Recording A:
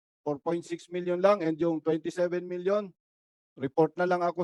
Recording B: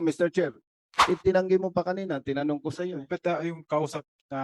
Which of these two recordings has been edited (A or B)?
B